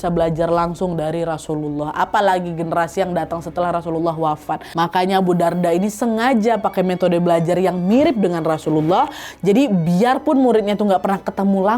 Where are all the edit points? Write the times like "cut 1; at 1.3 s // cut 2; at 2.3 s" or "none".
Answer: cut 1; at 4.7 s